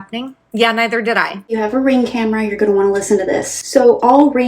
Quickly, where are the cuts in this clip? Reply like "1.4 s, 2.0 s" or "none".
1.5 s